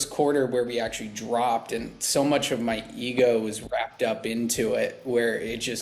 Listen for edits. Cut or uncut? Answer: uncut